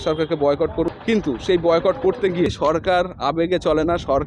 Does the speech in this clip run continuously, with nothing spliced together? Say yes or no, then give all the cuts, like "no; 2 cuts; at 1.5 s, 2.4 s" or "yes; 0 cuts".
no; 2 cuts; at 0.9 s, 2.5 s